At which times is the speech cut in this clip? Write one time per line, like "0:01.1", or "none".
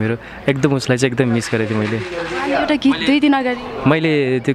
none